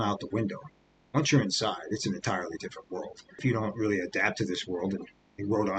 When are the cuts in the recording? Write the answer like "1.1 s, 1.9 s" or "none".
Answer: 3.4 s